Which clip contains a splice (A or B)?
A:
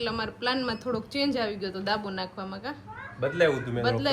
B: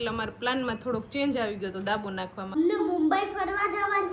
B